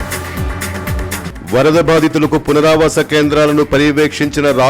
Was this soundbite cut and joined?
yes; 1 cut; at 1.1 s

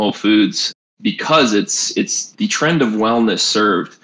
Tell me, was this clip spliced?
yes; 1 cut; at 2.2 s

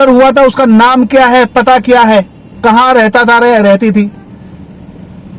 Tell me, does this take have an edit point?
no; 0 cuts

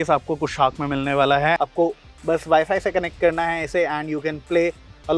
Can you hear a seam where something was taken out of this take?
yes; 1 cut; at 1.6 s

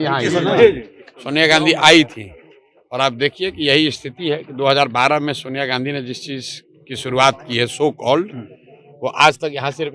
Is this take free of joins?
yes; 0 cuts

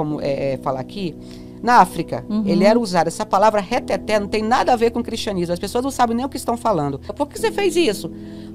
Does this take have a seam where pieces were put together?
yes; 1 cut; at 7.1 s

